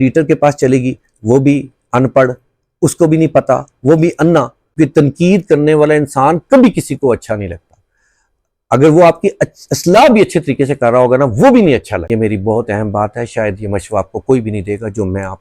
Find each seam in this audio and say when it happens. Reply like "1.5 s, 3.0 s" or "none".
4.6 s, 12.0 s